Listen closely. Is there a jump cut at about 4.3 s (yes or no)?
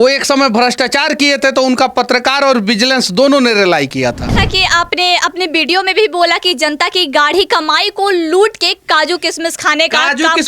yes